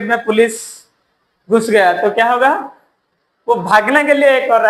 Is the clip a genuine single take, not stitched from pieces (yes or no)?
yes